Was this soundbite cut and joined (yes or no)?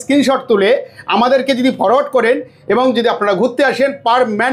no